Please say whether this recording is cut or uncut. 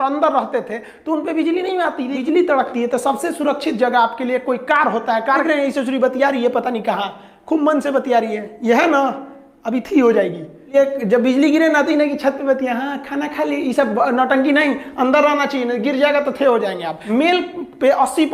cut